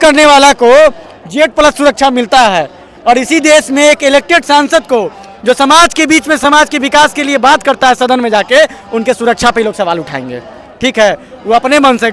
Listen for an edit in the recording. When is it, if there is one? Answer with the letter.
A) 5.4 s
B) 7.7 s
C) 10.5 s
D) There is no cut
D